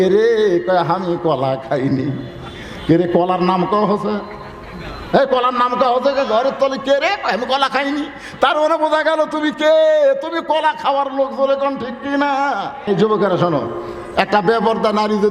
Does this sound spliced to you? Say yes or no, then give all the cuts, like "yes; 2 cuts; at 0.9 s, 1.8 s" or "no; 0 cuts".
yes; 1 cut; at 12.9 s